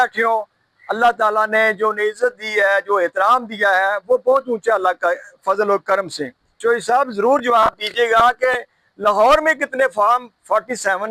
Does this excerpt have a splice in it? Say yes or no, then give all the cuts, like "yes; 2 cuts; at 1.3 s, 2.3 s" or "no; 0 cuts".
yes; 1 cut; at 6.6 s